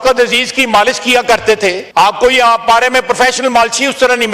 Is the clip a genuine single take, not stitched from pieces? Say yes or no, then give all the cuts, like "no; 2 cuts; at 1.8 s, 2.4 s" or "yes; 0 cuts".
no; 1 cut; at 1.8 s